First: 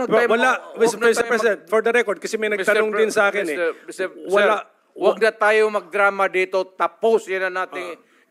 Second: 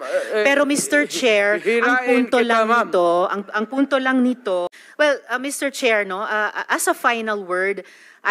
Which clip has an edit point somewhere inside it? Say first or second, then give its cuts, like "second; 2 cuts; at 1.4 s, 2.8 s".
second; 1 cut; at 4.8 s